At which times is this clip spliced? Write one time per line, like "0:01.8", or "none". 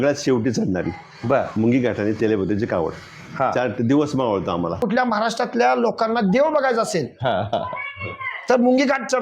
0:04.8